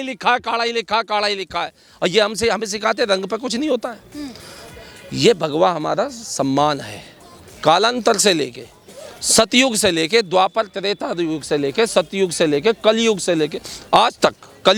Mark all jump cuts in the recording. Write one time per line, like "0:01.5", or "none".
none